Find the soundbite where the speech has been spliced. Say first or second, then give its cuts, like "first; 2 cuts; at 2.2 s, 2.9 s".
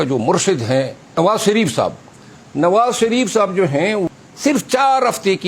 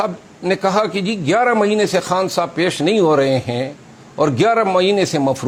first; 2 cuts; at 1.1 s, 4.1 s